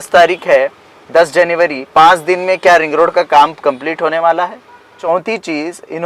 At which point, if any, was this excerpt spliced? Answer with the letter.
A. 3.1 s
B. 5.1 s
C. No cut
B